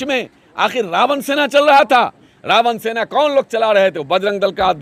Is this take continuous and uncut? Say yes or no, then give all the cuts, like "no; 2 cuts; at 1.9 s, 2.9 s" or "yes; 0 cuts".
yes; 0 cuts